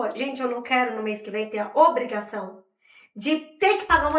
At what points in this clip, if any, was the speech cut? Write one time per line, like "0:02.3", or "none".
none